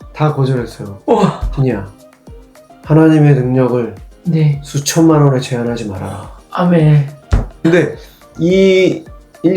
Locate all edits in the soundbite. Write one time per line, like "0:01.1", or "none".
0:01.5
0:07.6